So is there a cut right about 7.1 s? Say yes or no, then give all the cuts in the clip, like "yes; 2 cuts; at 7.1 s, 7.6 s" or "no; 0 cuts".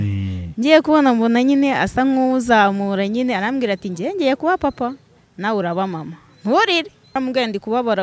yes; 1 cut; at 7.1 s